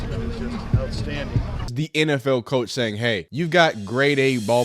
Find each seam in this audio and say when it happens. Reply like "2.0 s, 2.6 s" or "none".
1.7 s, 3.3 s